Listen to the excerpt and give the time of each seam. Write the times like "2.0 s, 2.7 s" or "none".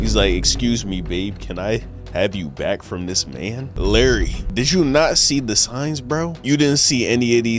3.7 s, 4.4 s, 6.4 s